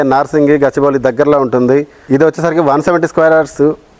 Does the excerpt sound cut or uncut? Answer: uncut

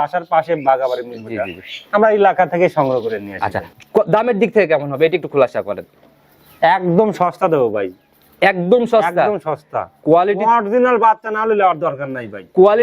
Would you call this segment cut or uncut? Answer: cut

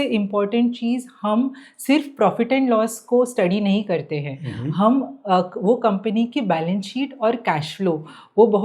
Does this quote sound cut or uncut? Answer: uncut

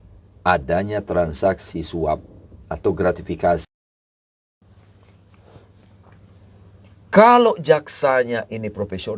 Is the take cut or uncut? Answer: cut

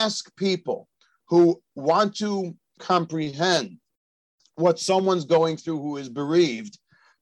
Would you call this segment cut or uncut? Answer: cut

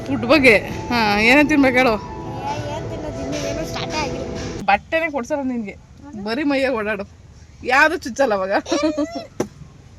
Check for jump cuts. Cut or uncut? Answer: cut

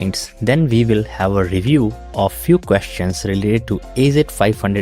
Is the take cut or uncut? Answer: uncut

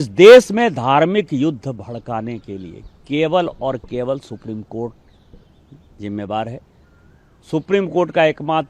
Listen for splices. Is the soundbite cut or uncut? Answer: uncut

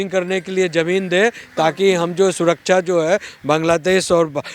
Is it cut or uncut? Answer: uncut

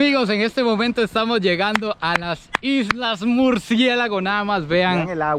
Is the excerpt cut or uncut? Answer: uncut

